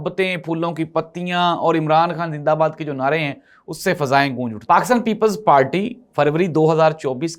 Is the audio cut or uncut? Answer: cut